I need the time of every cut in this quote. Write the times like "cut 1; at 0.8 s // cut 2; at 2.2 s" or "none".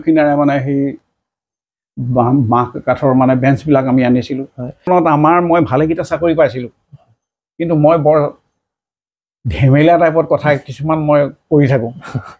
cut 1; at 4.9 s